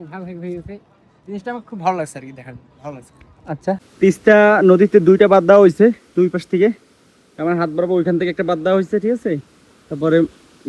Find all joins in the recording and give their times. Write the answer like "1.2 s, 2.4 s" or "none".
3.9 s